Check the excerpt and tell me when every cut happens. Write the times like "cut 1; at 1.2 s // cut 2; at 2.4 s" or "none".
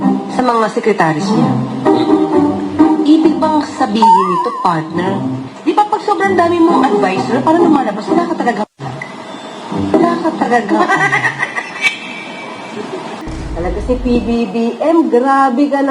cut 1; at 13.2 s